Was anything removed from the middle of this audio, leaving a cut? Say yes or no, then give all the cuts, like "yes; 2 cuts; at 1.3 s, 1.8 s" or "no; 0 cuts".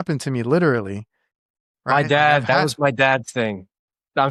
no; 0 cuts